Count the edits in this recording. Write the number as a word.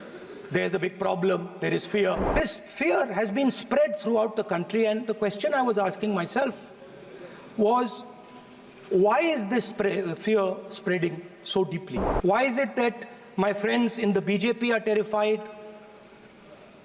two